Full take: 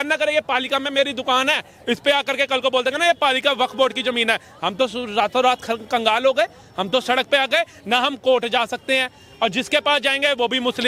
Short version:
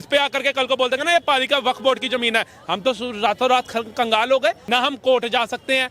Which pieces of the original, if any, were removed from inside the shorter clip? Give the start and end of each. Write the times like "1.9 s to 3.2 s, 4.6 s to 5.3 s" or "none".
6.6 s to 7.8 s

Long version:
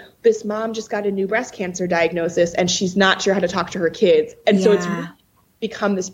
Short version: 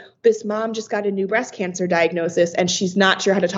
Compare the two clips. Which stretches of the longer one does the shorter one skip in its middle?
none

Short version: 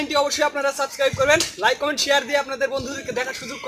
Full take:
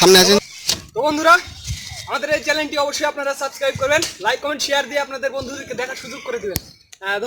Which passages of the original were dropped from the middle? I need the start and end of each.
none

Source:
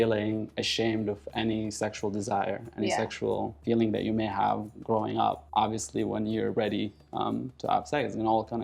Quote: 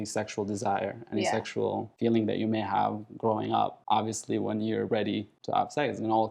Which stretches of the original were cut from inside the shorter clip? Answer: 7.0 s to 7.5 s

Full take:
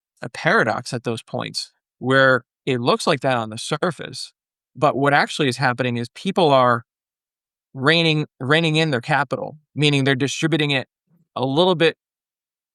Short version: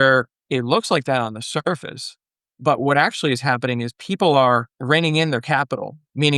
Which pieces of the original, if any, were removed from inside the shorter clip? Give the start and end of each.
6.9 s to 8.3 s

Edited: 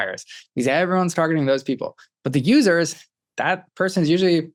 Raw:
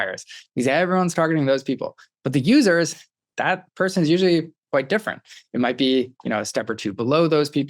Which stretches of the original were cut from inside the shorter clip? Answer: none

